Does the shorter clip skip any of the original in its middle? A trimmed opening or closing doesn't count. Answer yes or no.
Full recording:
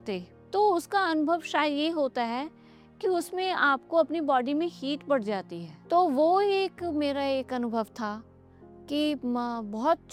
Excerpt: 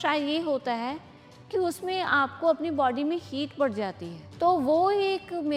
no